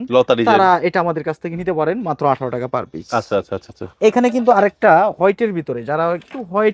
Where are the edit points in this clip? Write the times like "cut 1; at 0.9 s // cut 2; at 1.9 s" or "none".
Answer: none